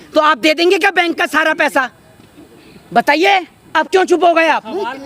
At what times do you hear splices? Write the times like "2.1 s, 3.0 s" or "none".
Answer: none